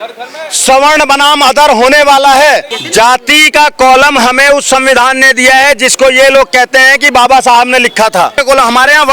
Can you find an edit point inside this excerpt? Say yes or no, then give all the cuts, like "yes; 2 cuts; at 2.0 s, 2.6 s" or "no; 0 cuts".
yes; 2 cuts; at 2.8 s, 8.4 s